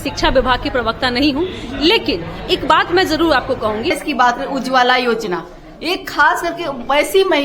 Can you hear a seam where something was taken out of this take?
yes; 1 cut; at 4.0 s

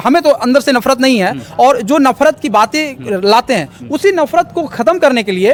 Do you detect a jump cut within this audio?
no; 0 cuts

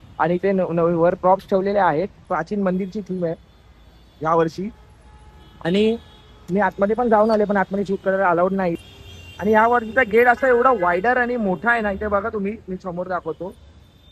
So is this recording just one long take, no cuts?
no; 2 cuts; at 2.2 s, 8.7 s

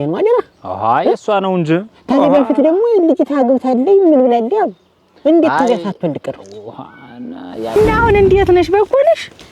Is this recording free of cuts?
no; 1 cut; at 7.8 s

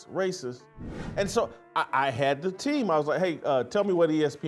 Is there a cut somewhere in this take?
no; 0 cuts

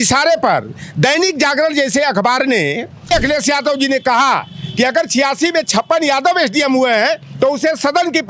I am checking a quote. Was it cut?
yes; 1 cut; at 3.1 s

